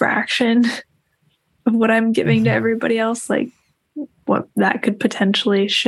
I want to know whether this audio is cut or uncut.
cut